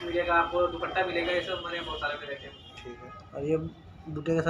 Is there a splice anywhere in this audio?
yes; 1 cut; at 2.7 s

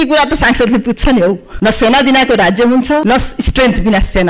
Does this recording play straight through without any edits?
no; 2 cuts; at 1.5 s, 3.0 s

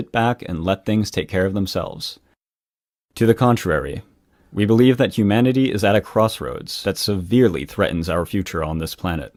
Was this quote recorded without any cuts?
yes; 0 cuts

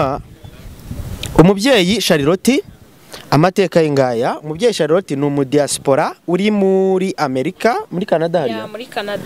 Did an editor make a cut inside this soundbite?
no; 0 cuts

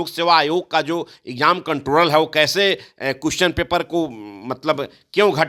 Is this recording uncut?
yes; 0 cuts

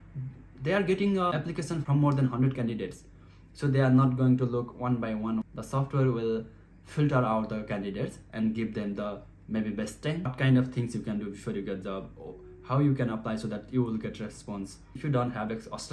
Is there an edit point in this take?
yes; 3 cuts; at 5.4 s, 10.3 s, 14.9 s

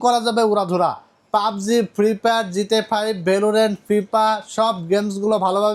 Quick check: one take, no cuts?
yes; 0 cuts

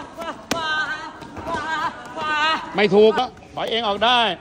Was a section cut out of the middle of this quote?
yes; 1 cut; at 3.2 s

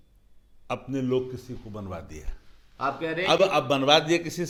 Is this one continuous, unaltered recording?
yes; 0 cuts

